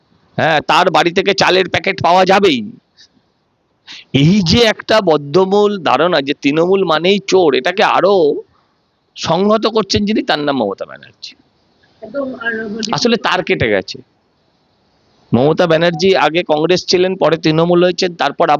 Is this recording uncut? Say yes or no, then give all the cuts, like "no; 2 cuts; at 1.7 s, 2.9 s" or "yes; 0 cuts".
yes; 0 cuts